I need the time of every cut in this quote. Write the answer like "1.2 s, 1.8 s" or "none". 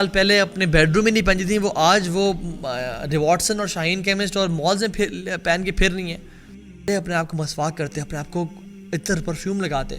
6.9 s